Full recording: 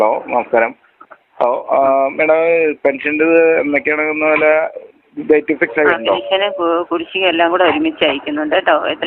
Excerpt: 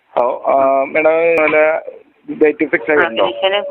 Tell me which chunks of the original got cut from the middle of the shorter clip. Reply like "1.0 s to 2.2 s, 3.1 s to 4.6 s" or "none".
2.6 s to 4.3 s